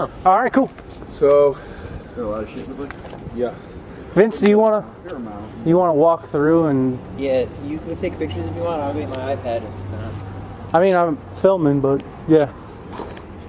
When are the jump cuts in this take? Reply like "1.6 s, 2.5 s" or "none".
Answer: none